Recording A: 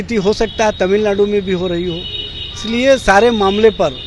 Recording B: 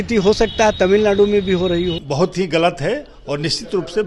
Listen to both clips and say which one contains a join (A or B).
B